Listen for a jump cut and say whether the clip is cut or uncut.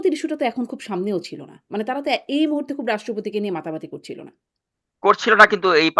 uncut